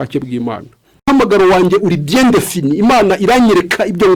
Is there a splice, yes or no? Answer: yes